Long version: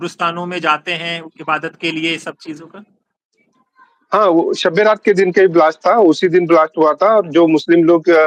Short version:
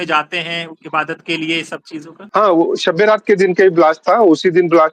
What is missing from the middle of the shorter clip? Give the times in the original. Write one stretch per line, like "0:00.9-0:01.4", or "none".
0:02.7-0:03.9